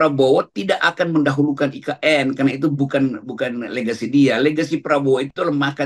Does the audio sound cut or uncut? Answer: uncut